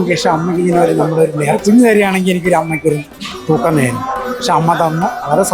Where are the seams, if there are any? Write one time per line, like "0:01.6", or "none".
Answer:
0:01.6